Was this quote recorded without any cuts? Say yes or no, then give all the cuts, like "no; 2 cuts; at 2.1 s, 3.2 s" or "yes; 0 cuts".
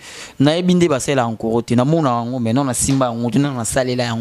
yes; 0 cuts